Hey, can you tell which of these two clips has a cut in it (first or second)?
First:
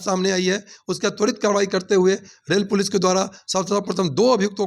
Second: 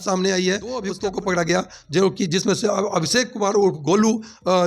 second